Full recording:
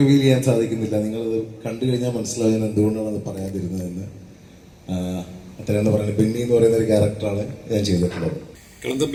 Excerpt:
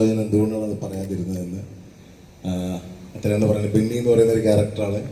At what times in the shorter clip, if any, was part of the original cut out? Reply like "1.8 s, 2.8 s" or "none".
none